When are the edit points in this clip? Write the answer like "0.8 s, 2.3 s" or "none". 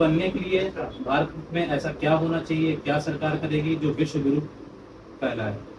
none